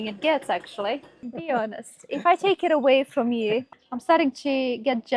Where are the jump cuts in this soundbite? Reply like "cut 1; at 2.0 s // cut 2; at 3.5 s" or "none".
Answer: cut 1; at 1.3 s // cut 2; at 3.7 s